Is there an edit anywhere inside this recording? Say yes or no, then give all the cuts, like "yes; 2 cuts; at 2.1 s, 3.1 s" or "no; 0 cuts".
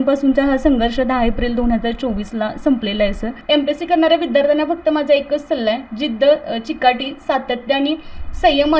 yes; 1 cut; at 3.4 s